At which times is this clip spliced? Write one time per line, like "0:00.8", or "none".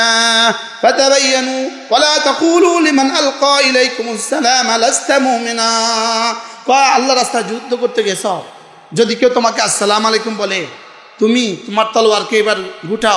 none